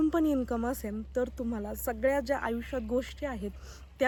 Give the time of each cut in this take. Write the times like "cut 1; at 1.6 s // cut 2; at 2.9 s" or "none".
none